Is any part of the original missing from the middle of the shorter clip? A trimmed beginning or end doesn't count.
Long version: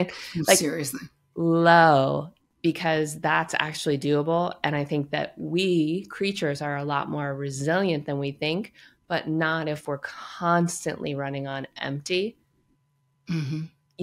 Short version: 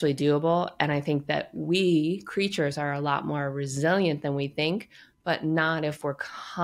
no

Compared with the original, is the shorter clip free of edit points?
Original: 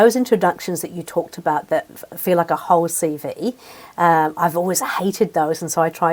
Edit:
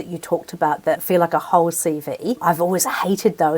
no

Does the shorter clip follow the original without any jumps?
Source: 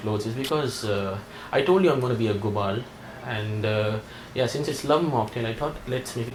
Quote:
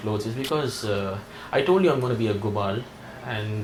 yes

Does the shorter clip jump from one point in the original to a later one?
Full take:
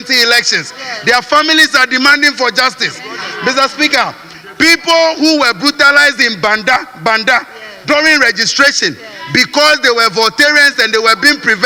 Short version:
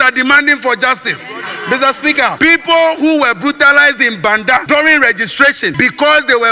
yes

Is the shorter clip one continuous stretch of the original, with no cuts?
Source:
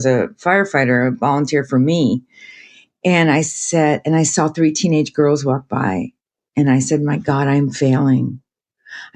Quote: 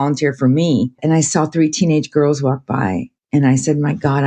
no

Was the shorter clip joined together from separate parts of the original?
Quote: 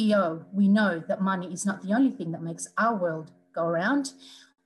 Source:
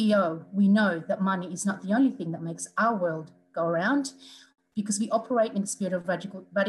no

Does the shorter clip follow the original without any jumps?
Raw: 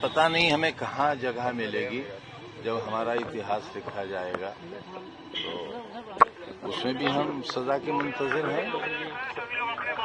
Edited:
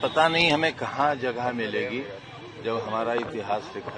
yes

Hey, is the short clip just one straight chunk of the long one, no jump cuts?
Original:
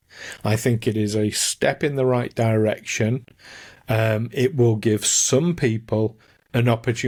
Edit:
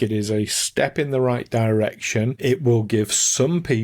no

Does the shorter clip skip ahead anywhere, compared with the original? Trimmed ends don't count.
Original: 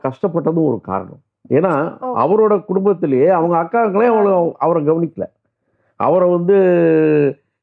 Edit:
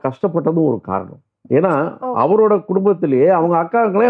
no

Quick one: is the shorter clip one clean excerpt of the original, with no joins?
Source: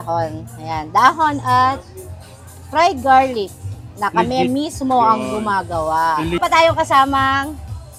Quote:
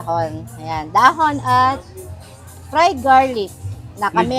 yes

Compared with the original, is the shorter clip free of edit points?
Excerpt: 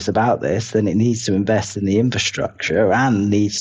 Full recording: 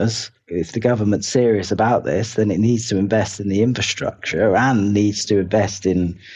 yes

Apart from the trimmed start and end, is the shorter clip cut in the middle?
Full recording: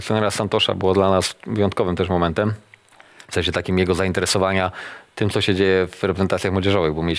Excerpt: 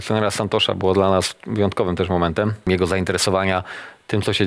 yes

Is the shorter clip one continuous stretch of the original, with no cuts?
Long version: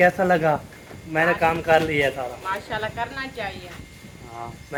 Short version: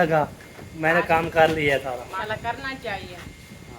no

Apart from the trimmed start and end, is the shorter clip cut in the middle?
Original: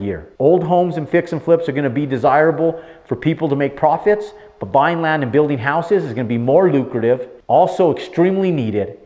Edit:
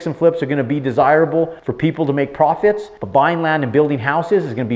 yes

